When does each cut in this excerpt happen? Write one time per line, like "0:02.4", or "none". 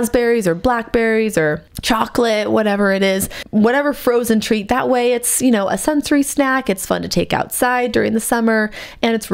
0:01.7
0:03.4